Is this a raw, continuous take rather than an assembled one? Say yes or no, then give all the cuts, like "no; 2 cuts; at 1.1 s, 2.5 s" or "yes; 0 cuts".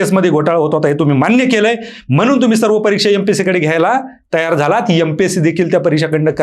yes; 0 cuts